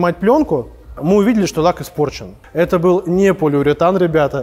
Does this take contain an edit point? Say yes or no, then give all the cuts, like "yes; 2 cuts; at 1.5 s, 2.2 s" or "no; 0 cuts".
yes; 1 cut; at 2.4 s